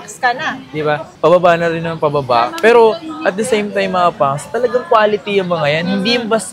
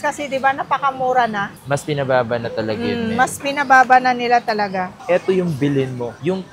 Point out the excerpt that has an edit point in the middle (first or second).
second